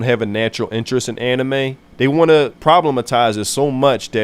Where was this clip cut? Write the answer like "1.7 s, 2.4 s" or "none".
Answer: 1.8 s, 2.5 s